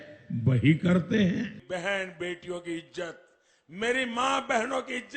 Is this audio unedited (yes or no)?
no